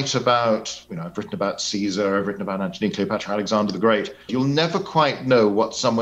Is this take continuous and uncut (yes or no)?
no